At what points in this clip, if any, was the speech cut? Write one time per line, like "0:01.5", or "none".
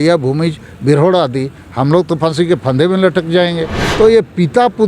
0:03.8